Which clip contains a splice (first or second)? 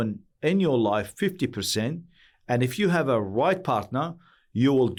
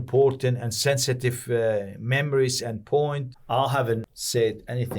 second